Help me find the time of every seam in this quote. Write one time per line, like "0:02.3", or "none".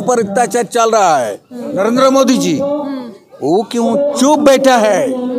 0:01.7